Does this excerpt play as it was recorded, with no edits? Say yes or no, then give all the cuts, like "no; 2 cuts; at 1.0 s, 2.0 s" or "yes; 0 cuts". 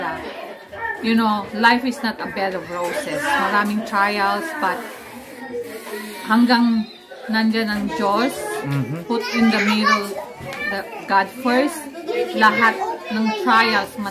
yes; 0 cuts